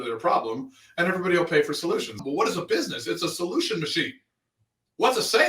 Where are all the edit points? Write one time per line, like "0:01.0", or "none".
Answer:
0:02.2